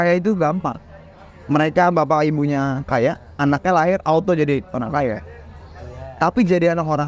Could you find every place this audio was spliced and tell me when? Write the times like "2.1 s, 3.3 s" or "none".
none